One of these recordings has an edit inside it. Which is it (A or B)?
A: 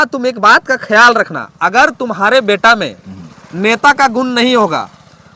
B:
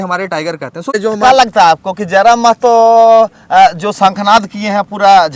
B